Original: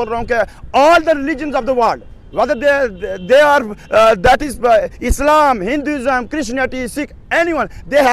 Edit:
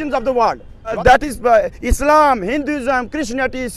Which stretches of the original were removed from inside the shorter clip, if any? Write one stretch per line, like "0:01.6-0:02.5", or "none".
0:02.4-0:04.2